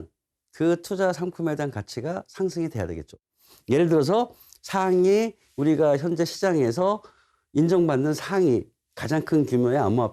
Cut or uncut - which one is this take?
cut